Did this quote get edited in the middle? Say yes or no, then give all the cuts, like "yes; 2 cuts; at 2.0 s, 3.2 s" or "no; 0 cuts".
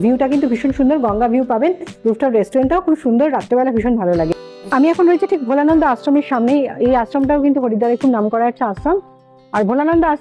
no; 0 cuts